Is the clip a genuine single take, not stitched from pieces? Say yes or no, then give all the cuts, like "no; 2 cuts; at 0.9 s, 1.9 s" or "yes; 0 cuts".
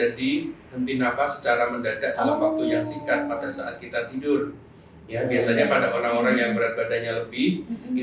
yes; 0 cuts